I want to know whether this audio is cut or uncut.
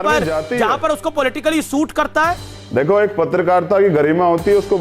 cut